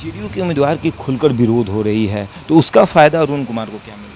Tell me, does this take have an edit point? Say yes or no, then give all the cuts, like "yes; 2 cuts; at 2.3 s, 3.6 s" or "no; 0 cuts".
no; 0 cuts